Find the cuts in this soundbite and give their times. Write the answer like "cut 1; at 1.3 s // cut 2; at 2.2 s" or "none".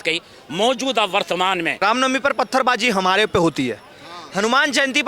cut 1; at 1.7 s